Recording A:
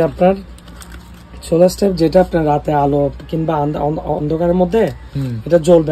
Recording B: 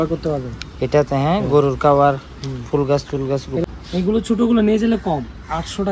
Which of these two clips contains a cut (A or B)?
B